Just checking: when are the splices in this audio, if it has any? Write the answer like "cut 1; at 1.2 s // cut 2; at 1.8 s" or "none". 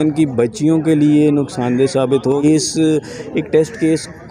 cut 1; at 2.4 s